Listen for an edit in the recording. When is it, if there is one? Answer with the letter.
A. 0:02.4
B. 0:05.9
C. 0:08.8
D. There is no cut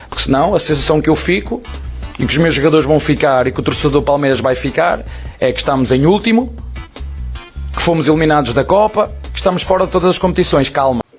D